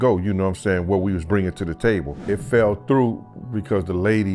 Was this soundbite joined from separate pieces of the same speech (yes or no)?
yes